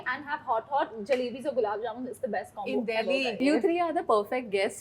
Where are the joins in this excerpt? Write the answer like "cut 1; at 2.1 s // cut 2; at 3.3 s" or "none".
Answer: cut 1; at 3.3 s

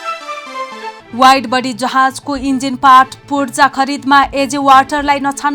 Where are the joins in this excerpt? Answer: none

